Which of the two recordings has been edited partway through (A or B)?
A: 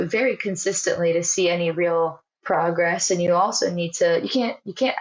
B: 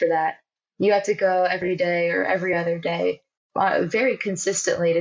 A